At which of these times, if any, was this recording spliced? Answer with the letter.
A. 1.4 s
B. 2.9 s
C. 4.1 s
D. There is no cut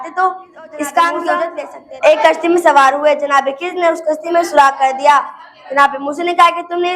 A